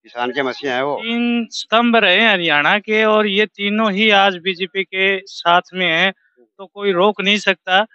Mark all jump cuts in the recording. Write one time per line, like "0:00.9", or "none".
0:01.0